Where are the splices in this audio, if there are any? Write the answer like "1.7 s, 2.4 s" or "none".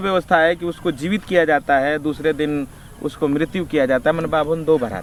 none